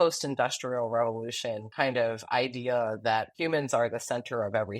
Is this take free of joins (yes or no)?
no